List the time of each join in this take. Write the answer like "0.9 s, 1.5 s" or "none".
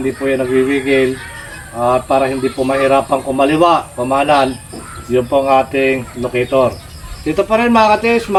none